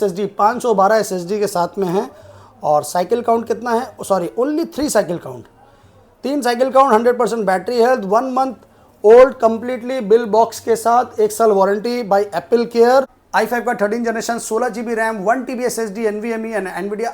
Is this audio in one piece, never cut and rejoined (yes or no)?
no